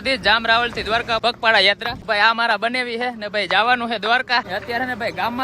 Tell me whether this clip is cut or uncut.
cut